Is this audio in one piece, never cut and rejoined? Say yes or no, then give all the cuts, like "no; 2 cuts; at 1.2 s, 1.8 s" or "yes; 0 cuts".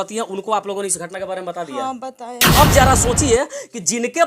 no; 1 cut; at 2.4 s